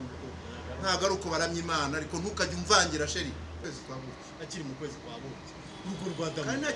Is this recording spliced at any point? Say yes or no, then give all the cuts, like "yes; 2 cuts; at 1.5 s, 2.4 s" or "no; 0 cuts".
yes; 1 cut; at 3.6 s